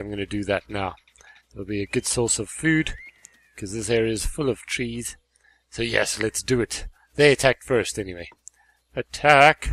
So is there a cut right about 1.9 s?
yes; 1 cut; at 1.9 s

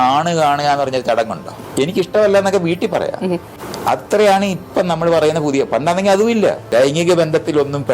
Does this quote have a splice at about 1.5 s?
yes; 2 cuts; at 1.5 s, 6.6 s

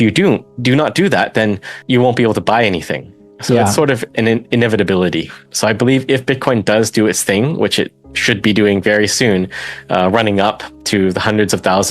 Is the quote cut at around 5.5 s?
yes; 1 cut; at 5.5 s

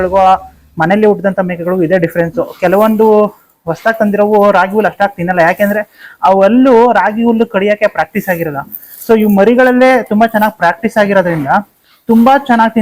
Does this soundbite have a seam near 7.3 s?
no; 0 cuts

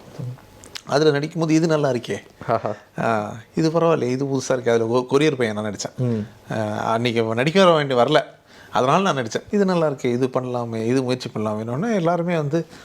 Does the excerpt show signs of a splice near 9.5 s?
yes; 1 cut; at 9.5 s

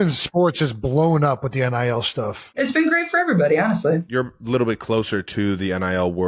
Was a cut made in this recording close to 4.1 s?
yes; 2 cuts; at 2.6 s, 4.1 s

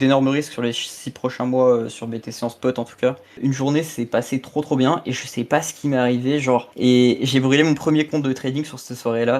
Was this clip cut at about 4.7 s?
no; 2 cuts; at 3.4 s, 6.7 s

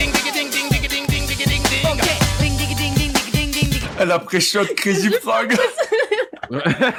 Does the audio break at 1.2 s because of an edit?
no; 0 cuts

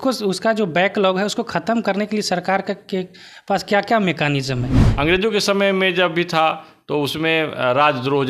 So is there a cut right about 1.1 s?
no; 1 cut; at 4.8 s

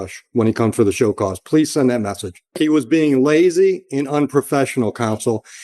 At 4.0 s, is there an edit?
no; 1 cut; at 2.6 s

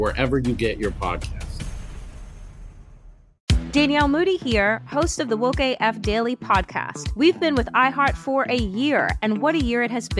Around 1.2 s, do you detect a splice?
yes; 1 cut; at 1.2 s

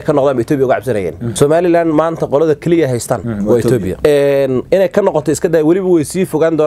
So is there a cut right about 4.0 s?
yes; 3 cuts; at 1.2 s, 3.3 s, 4.0 s

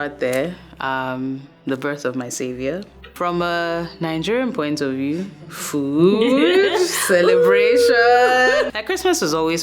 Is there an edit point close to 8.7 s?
yes; 2 cuts; at 3.1 s, 8.7 s

